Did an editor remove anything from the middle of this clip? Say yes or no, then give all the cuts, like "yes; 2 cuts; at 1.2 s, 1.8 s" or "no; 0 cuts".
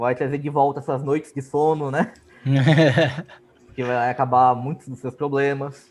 no; 0 cuts